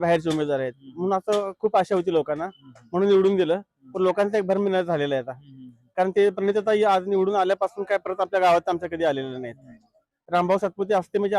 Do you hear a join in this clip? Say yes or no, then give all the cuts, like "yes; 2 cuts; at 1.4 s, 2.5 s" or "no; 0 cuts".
no; 0 cuts